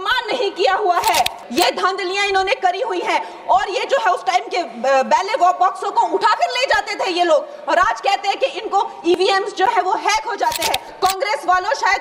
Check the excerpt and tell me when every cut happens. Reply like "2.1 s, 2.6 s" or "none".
1.4 s, 10.9 s